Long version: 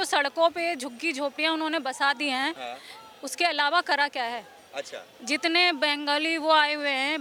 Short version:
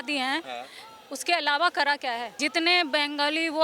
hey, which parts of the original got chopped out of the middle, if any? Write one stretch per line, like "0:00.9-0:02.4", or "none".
0:04.4-0:05.2